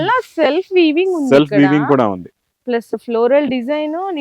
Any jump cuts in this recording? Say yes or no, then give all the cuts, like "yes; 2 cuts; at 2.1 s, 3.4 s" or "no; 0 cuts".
no; 0 cuts